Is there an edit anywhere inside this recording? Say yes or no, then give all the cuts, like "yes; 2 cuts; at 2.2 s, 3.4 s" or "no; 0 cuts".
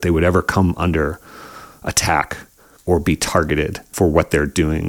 yes; 1 cut; at 3.8 s